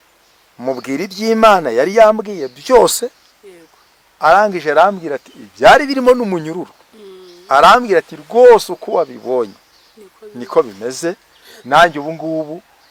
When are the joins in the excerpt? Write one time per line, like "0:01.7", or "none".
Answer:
none